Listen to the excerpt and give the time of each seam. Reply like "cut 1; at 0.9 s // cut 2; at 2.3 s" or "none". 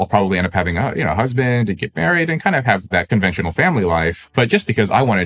cut 1; at 2.9 s // cut 2; at 4.2 s